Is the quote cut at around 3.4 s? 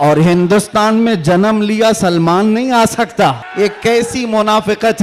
yes; 1 cut; at 3.4 s

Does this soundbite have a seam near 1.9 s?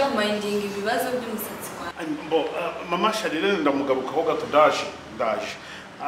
yes; 1 cut; at 1.9 s

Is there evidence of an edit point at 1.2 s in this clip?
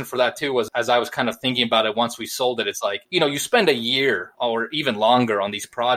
no; 2 cuts; at 3.0 s, 4.3 s

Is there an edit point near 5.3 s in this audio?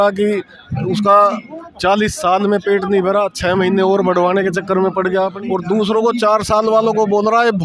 yes; 1 cut; at 5.3 s

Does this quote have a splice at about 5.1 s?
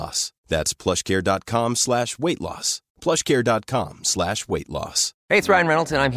no; 0 cuts

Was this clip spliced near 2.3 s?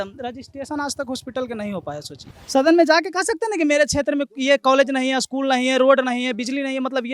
yes; 1 cut; at 2.3 s

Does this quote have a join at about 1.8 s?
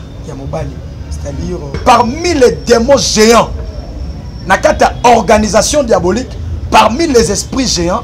yes; 1 cut; at 1.8 s

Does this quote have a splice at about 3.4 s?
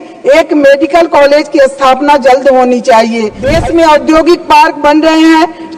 yes; 1 cut; at 3.4 s

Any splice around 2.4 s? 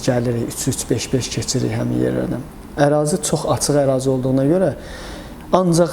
no; 0 cuts

